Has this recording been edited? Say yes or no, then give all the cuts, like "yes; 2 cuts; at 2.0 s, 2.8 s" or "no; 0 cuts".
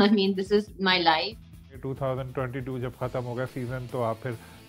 yes; 1 cut; at 1.8 s